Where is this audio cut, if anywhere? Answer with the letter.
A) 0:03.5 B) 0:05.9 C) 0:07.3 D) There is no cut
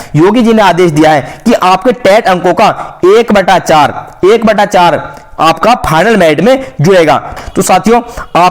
C